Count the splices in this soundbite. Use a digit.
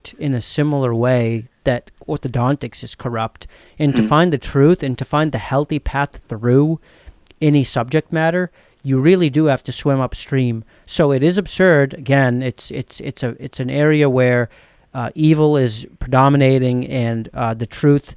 0